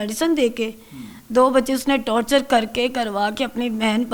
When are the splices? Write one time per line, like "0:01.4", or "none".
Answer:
none